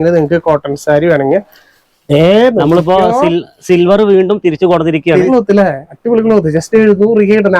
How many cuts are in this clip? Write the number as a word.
one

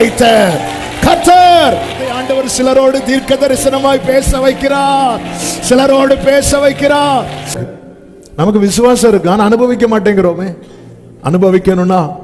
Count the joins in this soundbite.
one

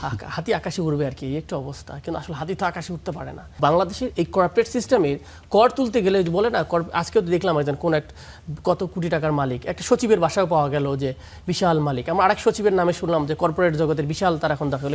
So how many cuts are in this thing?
one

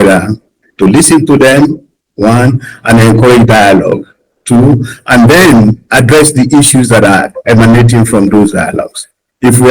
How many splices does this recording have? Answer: one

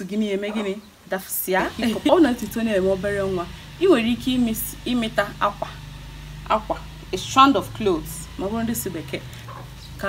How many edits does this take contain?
one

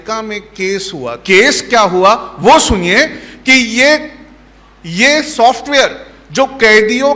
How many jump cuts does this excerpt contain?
one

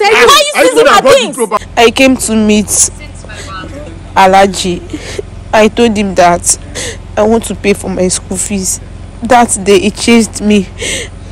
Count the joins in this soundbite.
one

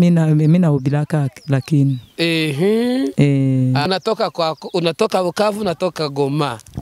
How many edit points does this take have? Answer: one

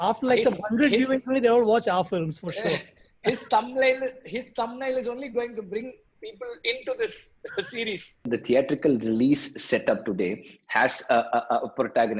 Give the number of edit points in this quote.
one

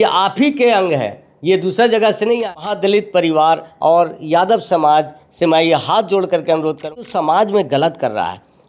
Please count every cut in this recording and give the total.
two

